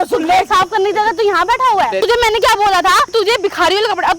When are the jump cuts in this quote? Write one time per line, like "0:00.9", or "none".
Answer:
0:02.0
0:03.1

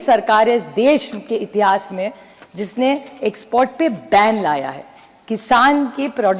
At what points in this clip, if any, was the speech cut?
none

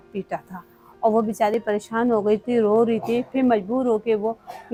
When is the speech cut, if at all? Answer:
none

